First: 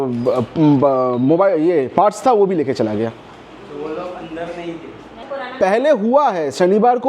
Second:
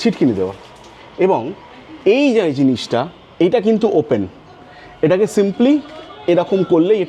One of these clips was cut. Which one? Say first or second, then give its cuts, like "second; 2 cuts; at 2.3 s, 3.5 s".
first; 1 cut; at 5.2 s